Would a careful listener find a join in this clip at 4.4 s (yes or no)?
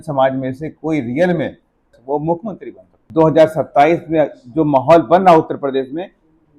no